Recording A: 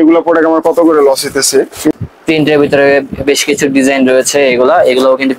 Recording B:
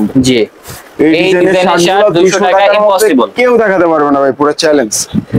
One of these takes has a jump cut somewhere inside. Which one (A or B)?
A